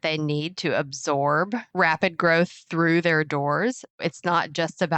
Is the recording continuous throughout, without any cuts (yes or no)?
no